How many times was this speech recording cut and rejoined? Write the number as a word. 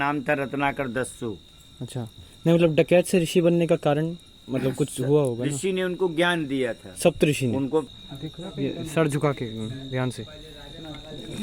one